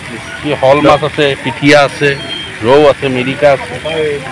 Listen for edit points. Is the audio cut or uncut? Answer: uncut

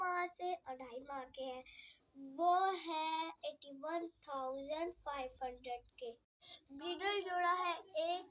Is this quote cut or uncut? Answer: uncut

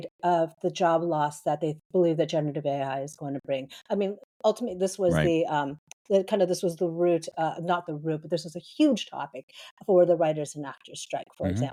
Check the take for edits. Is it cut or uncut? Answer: uncut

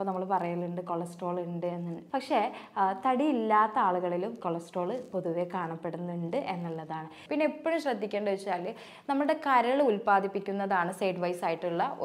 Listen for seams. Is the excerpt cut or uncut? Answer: cut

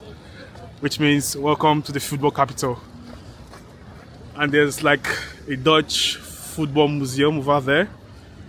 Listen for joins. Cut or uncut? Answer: uncut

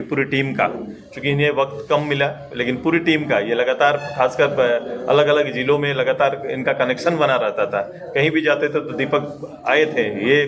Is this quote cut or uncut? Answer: uncut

